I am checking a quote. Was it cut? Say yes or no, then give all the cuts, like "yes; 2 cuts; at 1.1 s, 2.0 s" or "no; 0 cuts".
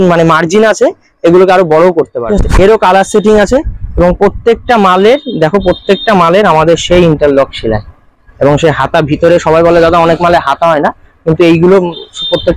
yes; 1 cut; at 2.2 s